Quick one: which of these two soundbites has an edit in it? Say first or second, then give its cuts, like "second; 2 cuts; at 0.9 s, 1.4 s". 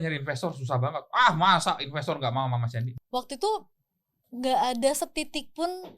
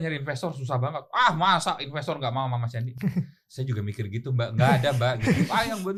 first; 1 cut; at 2.8 s